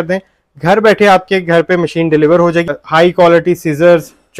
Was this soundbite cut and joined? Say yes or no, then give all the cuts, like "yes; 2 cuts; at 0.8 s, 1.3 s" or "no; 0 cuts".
yes; 1 cut; at 2.7 s